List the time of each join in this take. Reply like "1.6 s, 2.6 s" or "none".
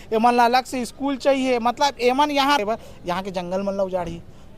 2.6 s